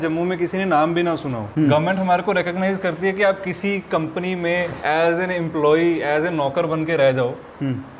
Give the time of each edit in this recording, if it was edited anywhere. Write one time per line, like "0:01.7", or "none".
0:01.4
0:04.8